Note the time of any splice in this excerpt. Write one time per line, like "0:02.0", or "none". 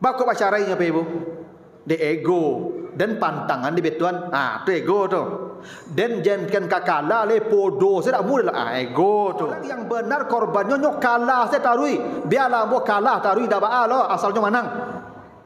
0:09.7